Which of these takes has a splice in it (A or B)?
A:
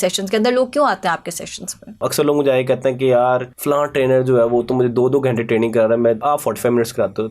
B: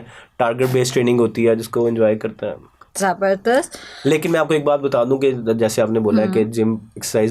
A